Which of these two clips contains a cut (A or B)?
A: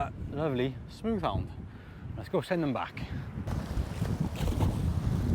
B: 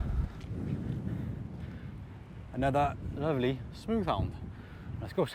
A